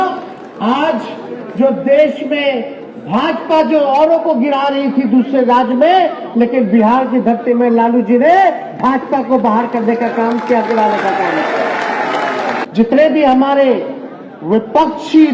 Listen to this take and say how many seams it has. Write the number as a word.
one